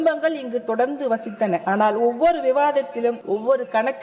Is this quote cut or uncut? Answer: cut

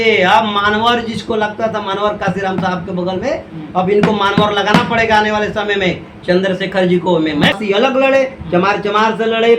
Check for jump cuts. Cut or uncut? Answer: cut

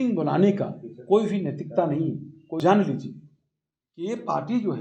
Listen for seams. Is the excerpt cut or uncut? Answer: cut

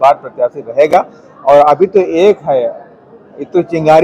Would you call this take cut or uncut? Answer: uncut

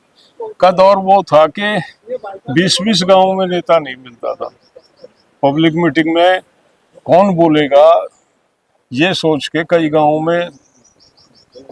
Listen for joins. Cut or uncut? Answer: uncut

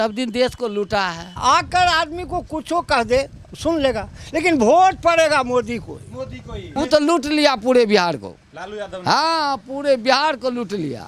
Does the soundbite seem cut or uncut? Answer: cut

